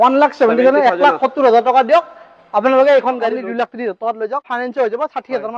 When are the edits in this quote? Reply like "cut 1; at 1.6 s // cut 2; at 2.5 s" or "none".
cut 1; at 3.3 s // cut 2; at 4.5 s